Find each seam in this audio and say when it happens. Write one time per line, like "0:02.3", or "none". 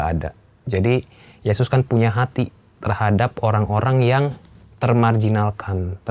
none